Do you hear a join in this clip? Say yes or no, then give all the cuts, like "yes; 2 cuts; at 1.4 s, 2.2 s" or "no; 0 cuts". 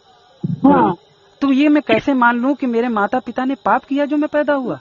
no; 0 cuts